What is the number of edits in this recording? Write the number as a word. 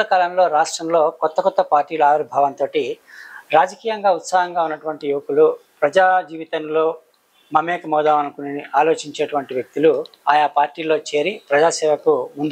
zero